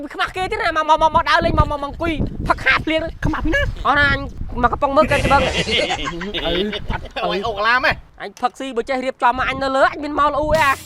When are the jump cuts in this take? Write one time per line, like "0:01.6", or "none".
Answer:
0:03.2
0:07.0